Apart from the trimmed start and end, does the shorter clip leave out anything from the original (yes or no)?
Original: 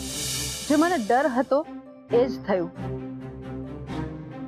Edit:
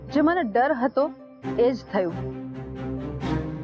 yes